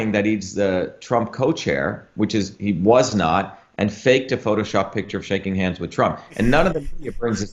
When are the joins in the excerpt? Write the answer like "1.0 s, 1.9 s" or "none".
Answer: none